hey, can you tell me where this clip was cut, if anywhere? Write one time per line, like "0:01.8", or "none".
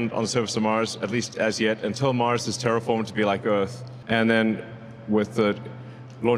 0:03.8